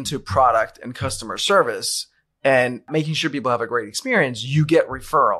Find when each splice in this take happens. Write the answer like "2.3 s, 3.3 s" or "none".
2.9 s